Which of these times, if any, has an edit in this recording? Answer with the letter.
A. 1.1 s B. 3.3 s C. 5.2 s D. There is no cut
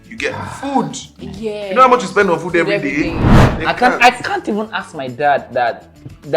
B